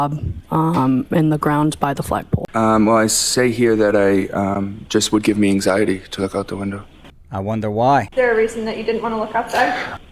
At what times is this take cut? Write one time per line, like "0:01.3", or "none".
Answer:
0:02.4